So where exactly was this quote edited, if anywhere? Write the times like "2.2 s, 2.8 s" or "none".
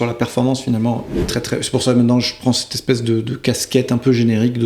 1.2 s